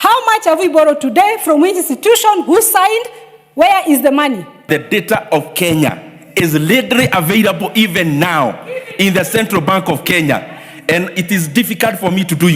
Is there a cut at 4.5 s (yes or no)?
yes